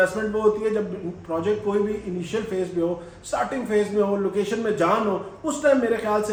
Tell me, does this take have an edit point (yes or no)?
no